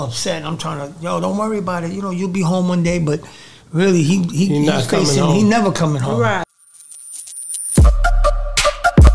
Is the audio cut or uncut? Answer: cut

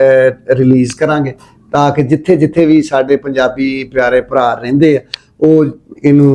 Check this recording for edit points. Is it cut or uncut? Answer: uncut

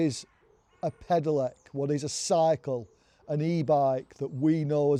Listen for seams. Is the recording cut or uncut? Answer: uncut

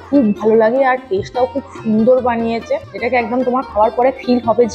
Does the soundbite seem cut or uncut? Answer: cut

